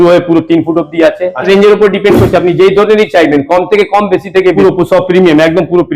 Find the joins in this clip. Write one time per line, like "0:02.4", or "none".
0:01.5
0:04.6